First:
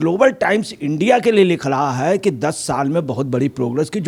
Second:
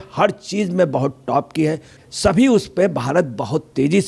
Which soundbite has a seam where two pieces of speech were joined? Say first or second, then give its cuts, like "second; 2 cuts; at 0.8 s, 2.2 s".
second; 1 cut; at 2.0 s